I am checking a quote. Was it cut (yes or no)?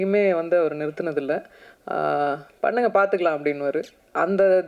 no